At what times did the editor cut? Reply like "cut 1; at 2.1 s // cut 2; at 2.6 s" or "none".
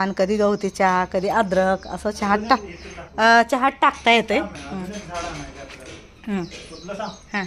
none